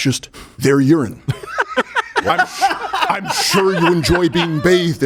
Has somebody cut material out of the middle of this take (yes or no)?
no